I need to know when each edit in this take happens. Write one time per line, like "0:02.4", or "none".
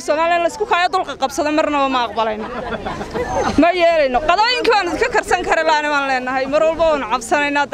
none